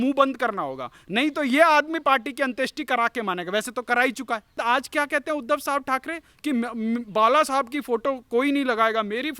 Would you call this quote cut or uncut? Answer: cut